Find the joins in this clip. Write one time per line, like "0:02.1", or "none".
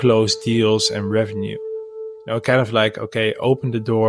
0:02.0